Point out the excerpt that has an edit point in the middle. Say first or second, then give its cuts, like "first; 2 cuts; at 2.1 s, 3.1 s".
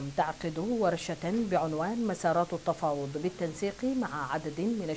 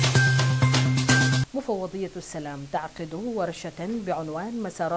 second; 1 cut; at 1.4 s